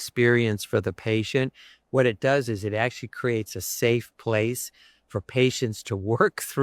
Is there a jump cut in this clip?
no; 0 cuts

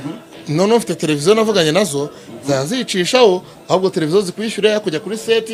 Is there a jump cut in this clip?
no; 0 cuts

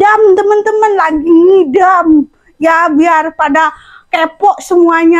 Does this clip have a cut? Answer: no; 0 cuts

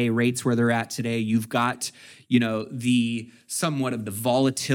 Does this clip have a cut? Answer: no; 0 cuts

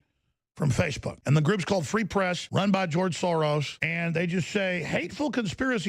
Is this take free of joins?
no; 3 cuts; at 1.2 s, 2.4 s, 3.8 s

